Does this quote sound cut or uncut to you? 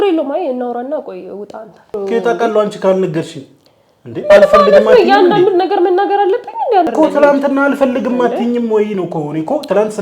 cut